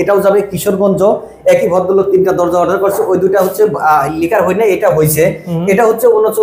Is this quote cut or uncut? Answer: uncut